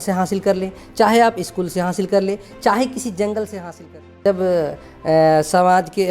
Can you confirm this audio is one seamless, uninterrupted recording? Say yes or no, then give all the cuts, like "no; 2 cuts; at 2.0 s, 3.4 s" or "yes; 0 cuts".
no; 1 cut; at 4.2 s